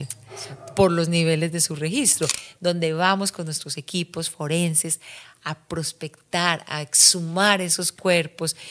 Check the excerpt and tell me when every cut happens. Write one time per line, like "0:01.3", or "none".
0:02.4